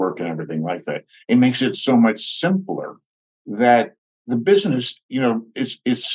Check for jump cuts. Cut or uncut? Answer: uncut